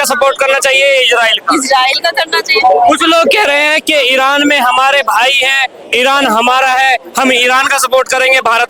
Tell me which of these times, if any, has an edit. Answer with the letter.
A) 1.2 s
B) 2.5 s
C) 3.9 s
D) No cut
D